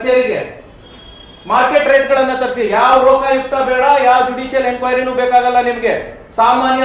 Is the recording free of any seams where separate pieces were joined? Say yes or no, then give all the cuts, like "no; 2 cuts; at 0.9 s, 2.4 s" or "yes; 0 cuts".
yes; 0 cuts